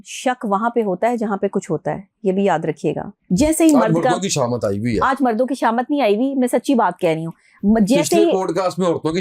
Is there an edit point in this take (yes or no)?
yes